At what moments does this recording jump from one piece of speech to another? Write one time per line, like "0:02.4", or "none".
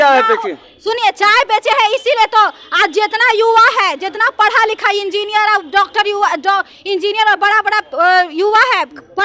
none